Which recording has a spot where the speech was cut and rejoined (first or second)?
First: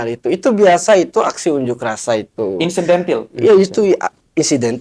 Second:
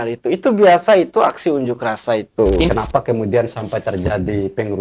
second